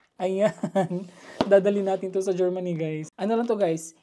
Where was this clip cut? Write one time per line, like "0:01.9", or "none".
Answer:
0:03.0